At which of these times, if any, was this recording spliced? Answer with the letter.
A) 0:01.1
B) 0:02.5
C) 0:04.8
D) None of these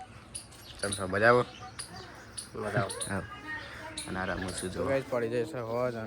C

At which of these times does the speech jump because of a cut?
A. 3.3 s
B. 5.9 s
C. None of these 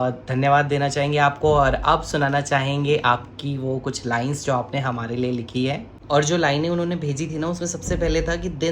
B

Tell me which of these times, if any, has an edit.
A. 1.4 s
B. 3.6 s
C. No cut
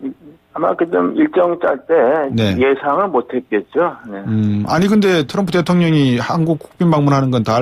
A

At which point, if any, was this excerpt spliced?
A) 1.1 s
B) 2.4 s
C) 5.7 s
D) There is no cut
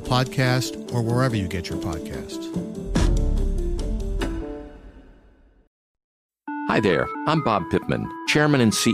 C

